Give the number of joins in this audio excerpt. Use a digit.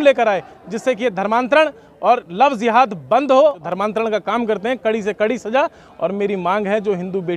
1